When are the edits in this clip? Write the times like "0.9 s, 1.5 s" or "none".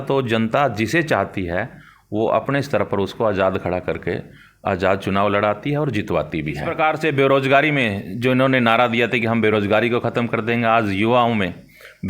6.7 s

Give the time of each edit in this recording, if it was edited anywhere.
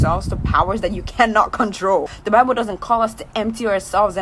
2.2 s

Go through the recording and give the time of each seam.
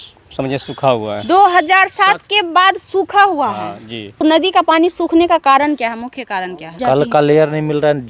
4.1 s, 6.8 s

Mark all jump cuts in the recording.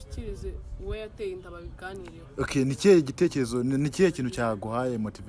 none

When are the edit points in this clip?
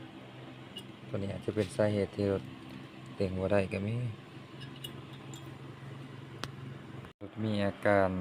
7.1 s

